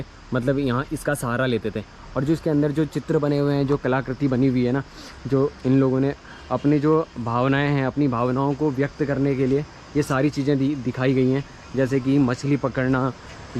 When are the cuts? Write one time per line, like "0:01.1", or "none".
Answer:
none